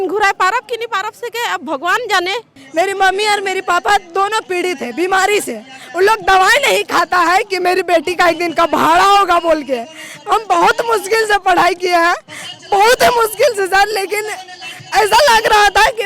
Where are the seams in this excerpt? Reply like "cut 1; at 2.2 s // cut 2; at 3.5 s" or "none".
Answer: cut 1; at 2.6 s